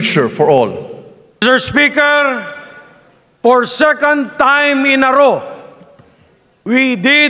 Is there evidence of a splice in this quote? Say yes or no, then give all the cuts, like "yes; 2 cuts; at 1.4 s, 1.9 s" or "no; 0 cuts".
yes; 1 cut; at 1.4 s